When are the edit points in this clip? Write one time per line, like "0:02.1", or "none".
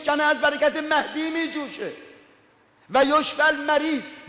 0:02.7